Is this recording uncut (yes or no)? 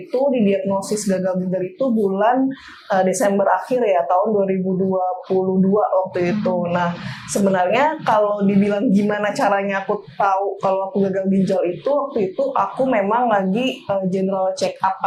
yes